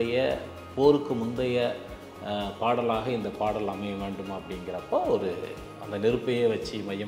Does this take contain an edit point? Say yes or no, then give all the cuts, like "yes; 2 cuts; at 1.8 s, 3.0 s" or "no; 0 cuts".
no; 0 cuts